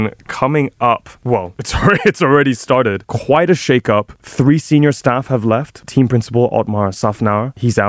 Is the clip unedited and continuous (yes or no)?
no